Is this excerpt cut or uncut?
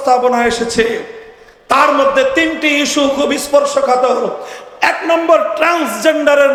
uncut